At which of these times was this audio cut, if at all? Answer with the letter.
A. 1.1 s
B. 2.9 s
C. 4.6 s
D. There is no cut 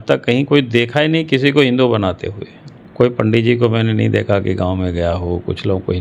D